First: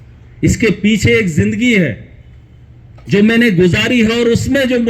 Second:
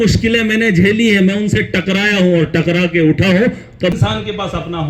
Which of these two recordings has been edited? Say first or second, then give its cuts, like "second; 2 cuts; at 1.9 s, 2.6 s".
second; 1 cut; at 3.9 s